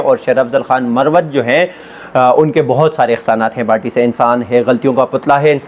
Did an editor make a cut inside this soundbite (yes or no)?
no